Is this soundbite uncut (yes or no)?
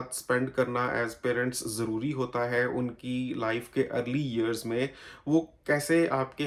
yes